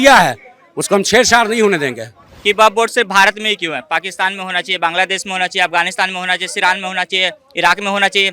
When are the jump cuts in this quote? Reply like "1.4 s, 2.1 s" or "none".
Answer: 2.2 s